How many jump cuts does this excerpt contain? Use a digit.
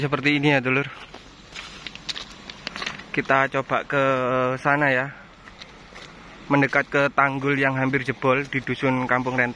0